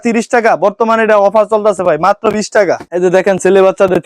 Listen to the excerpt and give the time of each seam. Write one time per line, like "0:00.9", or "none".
0:02.9

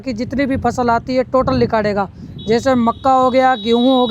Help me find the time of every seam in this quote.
none

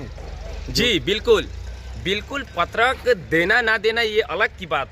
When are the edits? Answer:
none

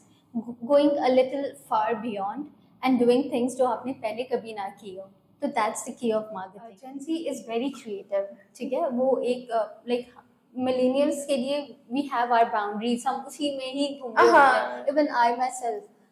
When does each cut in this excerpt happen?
0:06.8

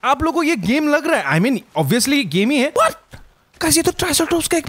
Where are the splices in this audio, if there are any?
0:02.7

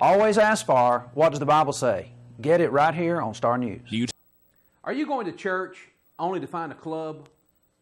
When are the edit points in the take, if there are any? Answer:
0:04.1

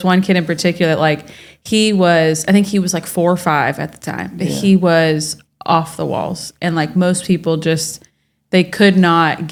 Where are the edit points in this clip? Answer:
none

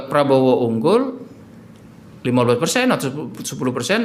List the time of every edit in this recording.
none

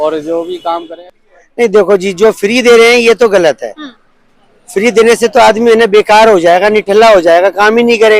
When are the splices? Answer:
0:00.9

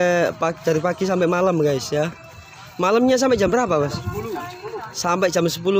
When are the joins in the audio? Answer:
none

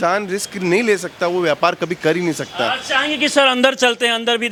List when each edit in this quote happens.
none

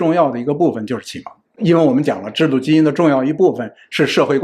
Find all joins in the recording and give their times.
0:01.6

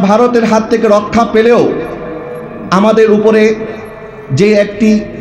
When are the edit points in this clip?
none

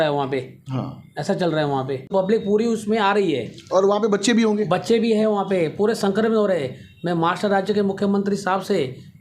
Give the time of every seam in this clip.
0:02.1

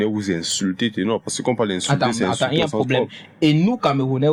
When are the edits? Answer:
none

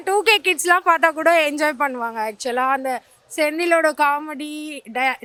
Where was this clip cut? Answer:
none

